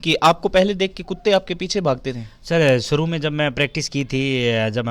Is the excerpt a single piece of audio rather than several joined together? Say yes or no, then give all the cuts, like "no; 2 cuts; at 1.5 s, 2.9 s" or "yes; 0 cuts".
yes; 0 cuts